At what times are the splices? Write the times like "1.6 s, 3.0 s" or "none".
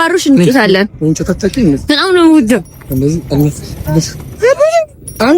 none

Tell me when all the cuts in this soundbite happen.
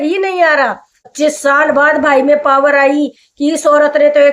1.1 s

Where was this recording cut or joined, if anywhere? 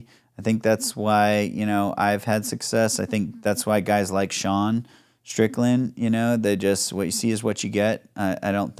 none

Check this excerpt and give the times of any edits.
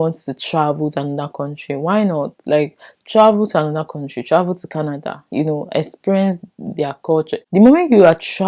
7.4 s

